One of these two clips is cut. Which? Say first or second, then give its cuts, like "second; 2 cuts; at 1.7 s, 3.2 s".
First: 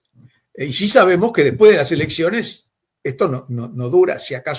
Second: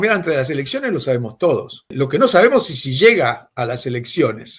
second; 1 cut; at 1.9 s